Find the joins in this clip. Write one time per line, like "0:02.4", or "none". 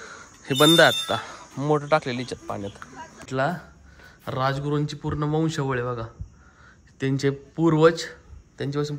0:03.3